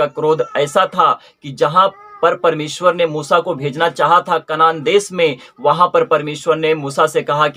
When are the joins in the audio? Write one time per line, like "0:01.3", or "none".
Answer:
none

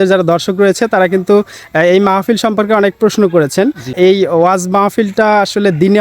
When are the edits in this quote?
0:03.9

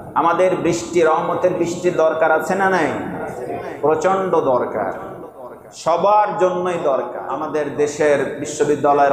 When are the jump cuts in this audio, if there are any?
0:07.3

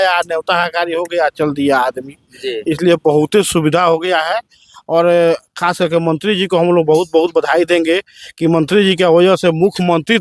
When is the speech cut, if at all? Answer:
none

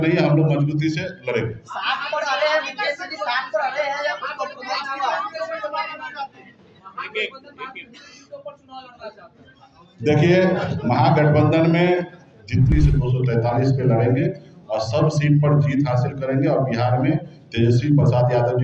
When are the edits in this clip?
0:12.7

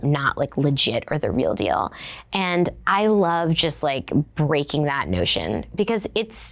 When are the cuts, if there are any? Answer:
none

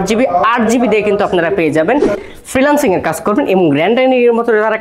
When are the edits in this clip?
0:02.2

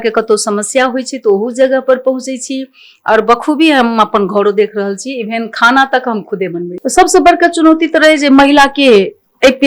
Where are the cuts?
0:06.7

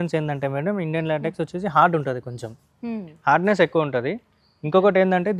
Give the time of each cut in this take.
none

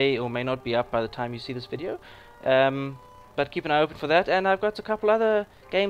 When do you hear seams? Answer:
none

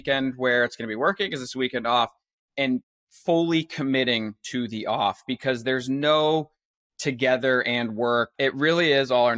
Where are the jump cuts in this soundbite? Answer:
0:08.3

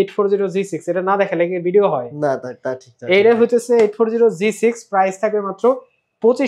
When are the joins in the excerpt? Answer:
none

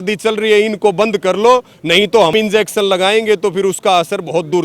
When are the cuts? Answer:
0:02.3

